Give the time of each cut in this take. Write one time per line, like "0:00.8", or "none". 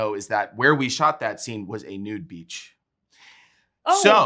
none